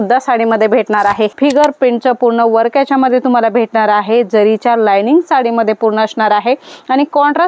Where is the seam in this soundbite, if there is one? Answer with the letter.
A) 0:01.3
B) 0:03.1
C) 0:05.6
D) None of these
A